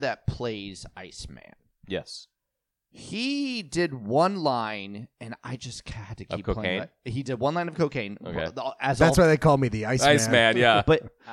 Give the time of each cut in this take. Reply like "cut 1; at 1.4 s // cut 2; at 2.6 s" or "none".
none